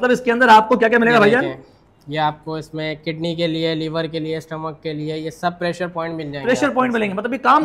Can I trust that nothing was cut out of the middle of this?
yes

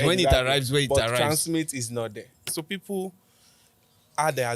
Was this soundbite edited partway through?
yes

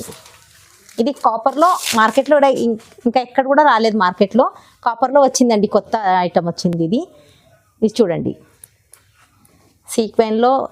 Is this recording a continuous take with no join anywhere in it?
yes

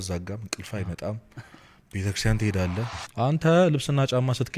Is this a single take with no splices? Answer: no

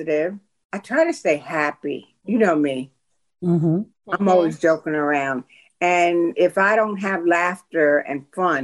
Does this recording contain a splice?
no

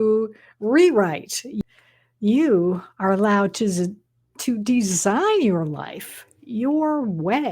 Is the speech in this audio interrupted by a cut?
yes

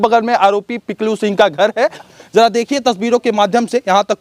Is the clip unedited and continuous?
yes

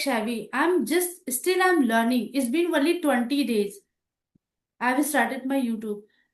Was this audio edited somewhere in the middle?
no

